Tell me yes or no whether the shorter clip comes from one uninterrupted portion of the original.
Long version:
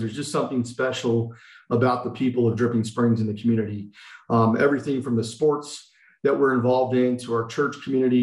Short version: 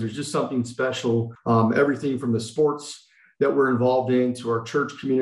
no